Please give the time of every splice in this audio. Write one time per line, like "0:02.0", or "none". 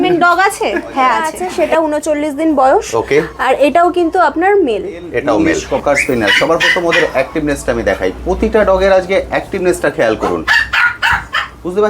0:01.4
0:05.4